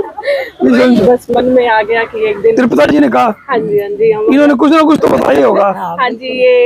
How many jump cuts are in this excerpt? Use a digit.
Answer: 1